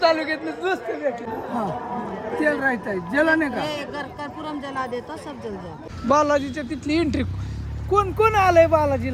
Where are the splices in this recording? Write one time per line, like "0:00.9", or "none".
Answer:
0:01.3
0:05.9